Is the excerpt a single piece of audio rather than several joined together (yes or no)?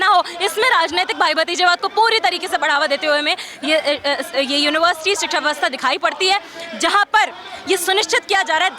yes